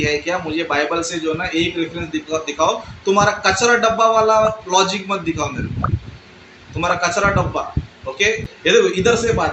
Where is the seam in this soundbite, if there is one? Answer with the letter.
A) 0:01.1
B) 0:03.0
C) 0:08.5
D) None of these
C